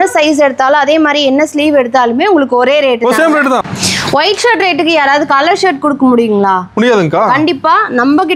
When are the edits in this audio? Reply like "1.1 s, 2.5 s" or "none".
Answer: 3.7 s

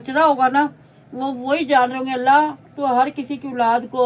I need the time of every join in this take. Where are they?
none

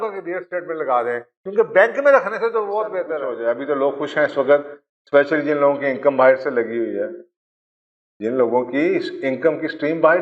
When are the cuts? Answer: 3.3 s

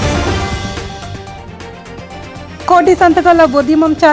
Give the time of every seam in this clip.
1.2 s

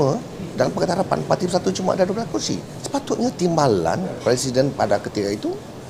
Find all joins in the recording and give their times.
2.7 s

